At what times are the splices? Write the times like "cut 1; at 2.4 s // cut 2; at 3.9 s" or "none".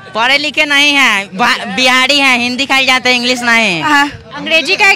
cut 1; at 3.8 s